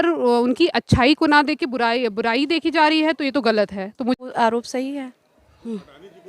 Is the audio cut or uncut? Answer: cut